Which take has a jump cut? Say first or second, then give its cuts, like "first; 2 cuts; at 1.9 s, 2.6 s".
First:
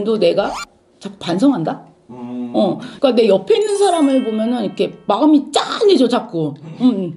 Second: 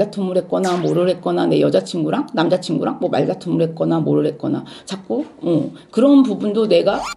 first; 1 cut; at 2.9 s